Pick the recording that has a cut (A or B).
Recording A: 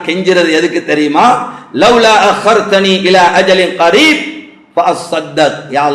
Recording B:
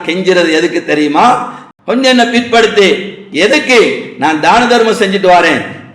B